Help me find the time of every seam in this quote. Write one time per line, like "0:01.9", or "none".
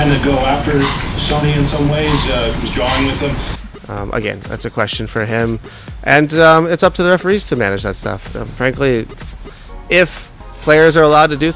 0:03.5